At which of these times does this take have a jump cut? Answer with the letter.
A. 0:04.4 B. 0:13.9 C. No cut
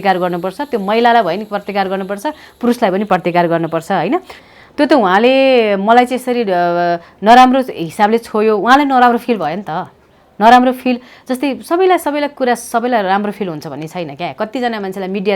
A